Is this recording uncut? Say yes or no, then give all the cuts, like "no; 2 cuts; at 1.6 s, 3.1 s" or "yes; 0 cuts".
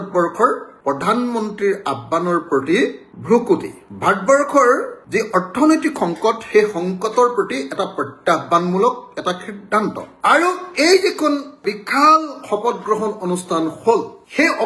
yes; 0 cuts